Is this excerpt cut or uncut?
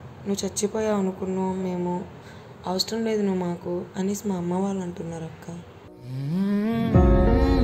uncut